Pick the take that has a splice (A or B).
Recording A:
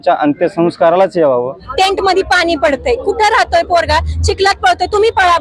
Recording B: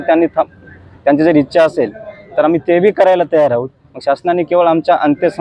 A